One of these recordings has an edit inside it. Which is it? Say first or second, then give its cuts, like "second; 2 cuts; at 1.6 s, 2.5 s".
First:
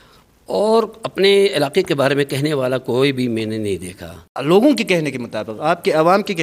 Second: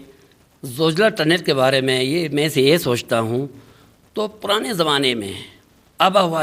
first; 1 cut; at 4.3 s